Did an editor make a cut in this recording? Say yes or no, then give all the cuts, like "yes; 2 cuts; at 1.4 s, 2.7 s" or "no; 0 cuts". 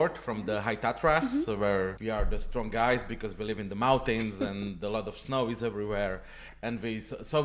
yes; 1 cut; at 2.0 s